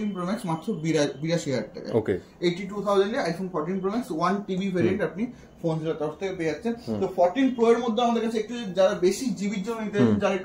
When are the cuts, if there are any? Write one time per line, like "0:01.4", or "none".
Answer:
none

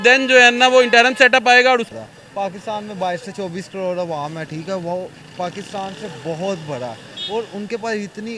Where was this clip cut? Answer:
0:01.9

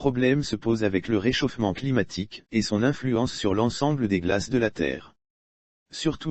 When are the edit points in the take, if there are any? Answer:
0:03.2

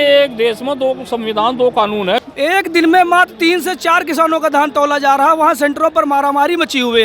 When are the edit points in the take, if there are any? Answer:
0:02.2

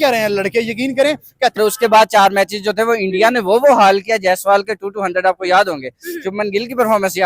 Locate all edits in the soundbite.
0:01.6

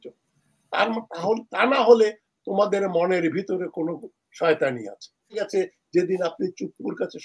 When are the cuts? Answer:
0:05.4

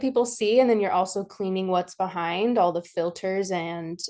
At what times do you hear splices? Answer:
none

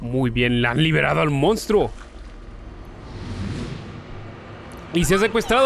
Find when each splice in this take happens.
none

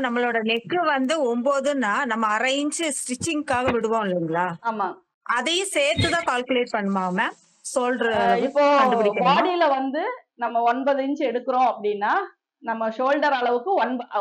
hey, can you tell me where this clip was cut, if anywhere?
none

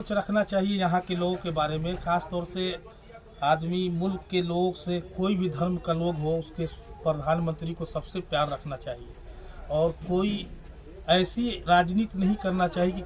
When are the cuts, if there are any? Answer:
none

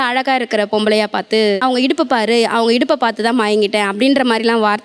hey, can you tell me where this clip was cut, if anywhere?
0:01.6

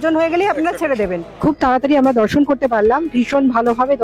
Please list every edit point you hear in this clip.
0:01.4

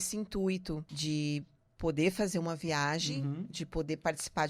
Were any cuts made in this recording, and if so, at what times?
0:00.9

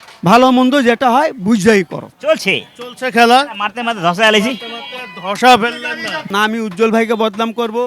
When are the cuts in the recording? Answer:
0:02.1
0:06.3

